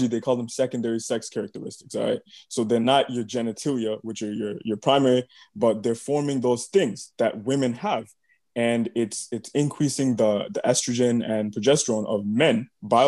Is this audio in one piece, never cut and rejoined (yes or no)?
yes